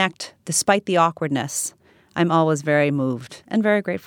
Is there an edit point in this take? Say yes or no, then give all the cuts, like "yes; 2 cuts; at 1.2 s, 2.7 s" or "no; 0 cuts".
no; 0 cuts